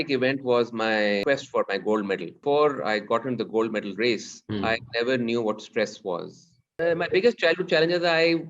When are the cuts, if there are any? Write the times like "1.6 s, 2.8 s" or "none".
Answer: 1.2 s, 2.4 s, 4.4 s, 6.8 s